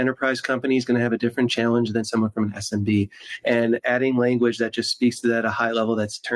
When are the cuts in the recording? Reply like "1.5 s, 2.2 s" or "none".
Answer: none